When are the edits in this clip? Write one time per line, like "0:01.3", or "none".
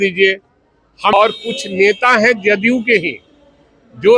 0:01.2

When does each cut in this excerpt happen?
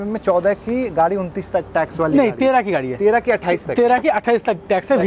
none

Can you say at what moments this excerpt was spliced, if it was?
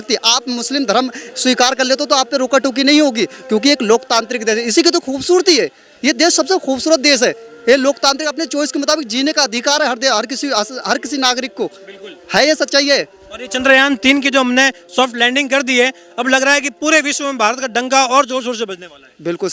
none

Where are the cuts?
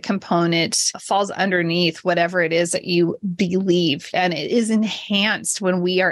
0:00.9
0:04.0

